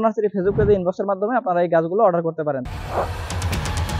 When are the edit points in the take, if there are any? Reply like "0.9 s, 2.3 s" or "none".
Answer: 2.6 s